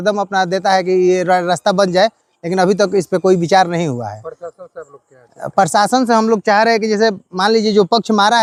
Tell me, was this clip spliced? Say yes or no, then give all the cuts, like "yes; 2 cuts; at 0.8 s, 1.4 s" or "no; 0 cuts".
no; 0 cuts